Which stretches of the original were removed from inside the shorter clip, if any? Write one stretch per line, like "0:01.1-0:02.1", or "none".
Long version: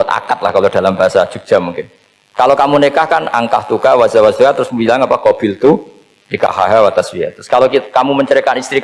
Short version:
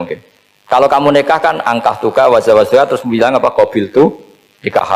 none